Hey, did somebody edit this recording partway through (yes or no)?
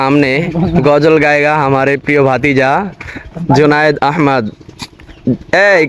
no